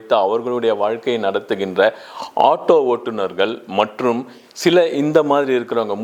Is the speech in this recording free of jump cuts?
yes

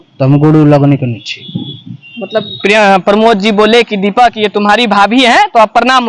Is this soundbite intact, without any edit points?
yes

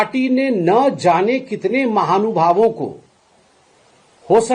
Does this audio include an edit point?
no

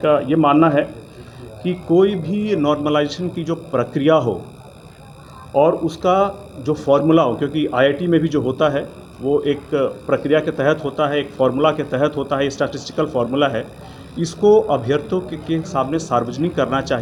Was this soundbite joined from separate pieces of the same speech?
no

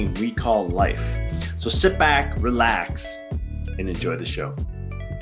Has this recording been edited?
no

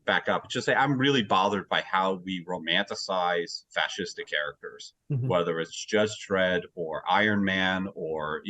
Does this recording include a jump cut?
no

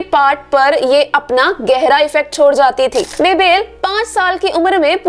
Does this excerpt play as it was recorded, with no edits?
no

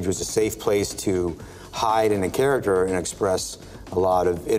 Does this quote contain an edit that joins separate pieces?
no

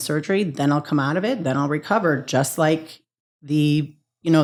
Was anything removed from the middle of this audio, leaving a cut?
no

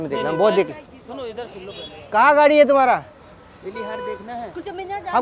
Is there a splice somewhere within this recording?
no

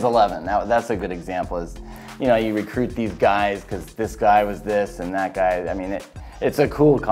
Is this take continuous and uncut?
yes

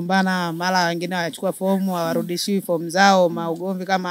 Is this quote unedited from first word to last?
yes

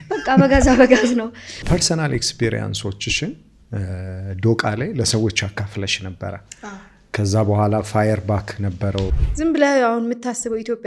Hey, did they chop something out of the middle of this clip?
yes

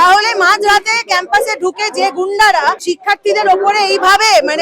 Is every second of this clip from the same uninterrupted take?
no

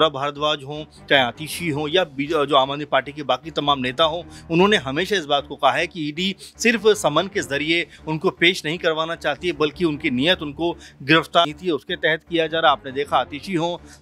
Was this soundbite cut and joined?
yes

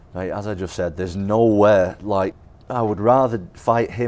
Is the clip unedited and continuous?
no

